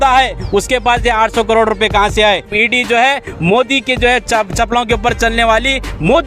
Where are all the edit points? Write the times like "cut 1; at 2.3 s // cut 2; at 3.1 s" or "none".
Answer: cut 1; at 2.5 s